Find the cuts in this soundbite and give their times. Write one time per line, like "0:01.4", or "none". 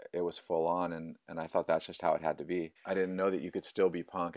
0:02.8